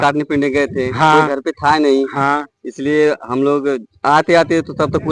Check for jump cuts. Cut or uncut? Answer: uncut